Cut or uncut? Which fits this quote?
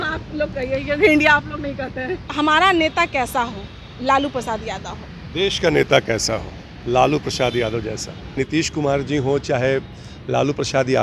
cut